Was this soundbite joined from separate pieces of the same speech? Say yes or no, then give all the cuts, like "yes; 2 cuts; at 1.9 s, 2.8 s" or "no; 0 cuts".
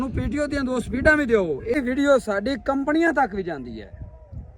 yes; 1 cut; at 1.8 s